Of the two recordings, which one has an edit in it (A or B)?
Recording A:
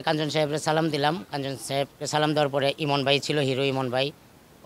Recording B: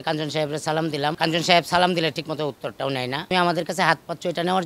B